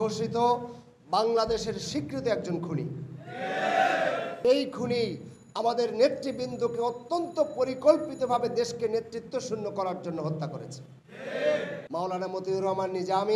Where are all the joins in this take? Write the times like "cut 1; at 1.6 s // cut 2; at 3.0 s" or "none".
cut 1; at 4.3 s